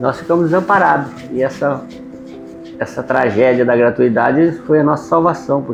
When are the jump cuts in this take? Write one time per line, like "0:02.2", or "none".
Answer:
none

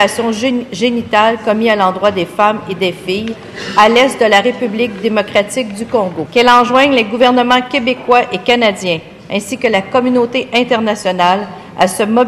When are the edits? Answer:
0:06.2

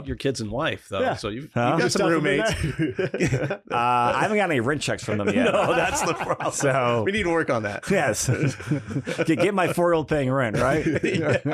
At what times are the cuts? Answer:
none

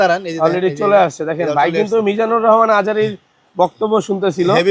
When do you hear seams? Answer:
none

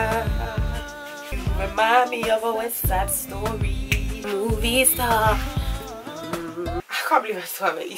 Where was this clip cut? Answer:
0:04.2
0:06.8

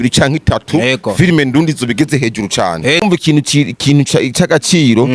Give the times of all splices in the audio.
0:03.0

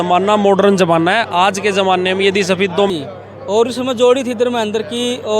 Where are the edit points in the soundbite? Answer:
0:02.9

